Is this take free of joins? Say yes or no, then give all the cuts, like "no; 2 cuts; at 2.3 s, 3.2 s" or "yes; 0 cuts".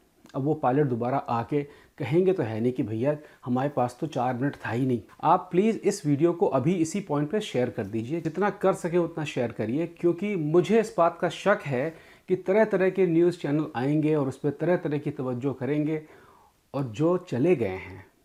yes; 0 cuts